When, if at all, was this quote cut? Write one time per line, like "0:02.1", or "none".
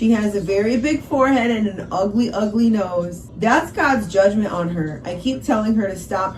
0:03.2